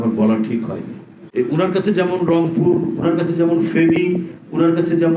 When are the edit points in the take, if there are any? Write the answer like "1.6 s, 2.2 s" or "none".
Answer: 1.2 s